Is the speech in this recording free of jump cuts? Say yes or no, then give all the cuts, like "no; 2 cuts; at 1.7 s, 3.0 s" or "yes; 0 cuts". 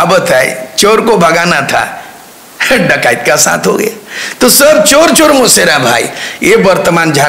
yes; 0 cuts